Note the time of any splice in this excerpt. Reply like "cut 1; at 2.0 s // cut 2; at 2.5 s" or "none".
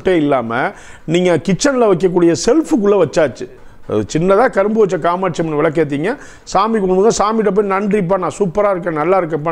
none